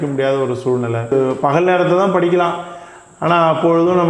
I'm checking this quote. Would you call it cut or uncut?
cut